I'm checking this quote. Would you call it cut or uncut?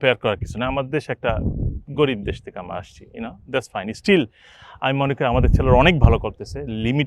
uncut